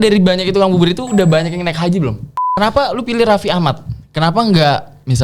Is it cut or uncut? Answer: cut